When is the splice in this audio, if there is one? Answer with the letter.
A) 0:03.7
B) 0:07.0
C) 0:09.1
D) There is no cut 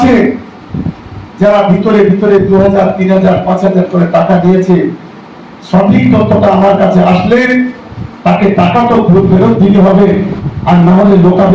D